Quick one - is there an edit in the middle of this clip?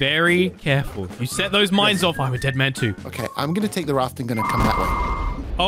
no; 0 cuts

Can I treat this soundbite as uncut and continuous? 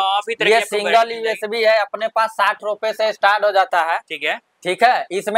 yes; 0 cuts

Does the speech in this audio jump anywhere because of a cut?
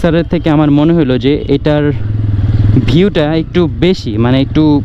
no; 0 cuts

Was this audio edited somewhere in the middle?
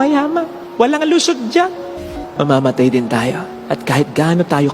yes; 1 cut; at 2.0 s

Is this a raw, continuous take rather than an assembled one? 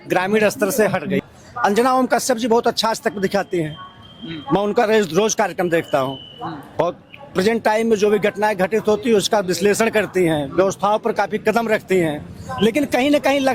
no; 1 cut; at 1.2 s

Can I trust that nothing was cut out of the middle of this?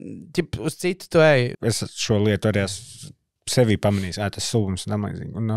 no; 1 cut; at 1.5 s

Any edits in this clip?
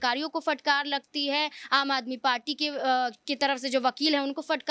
no; 0 cuts

